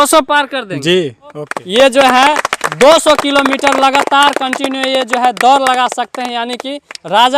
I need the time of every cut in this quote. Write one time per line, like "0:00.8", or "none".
0:01.5